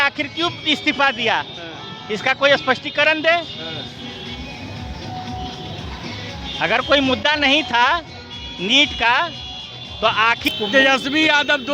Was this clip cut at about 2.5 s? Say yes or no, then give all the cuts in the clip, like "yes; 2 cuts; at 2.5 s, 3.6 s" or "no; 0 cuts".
no; 1 cut; at 10.5 s